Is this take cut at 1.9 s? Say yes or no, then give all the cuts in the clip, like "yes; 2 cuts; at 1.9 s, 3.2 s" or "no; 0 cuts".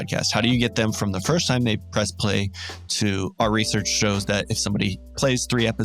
yes; 1 cut; at 1.9 s